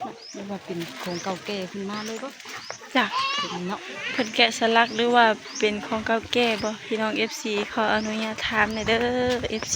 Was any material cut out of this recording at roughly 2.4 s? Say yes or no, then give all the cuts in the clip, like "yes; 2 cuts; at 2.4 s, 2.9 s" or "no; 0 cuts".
no; 0 cuts